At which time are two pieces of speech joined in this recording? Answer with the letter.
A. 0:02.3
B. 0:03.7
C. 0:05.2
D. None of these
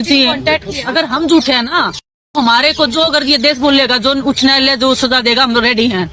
D